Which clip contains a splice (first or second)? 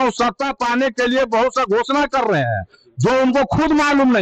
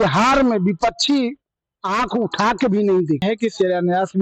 second